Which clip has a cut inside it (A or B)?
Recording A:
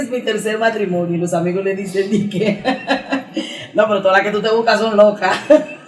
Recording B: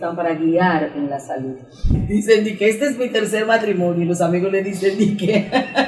B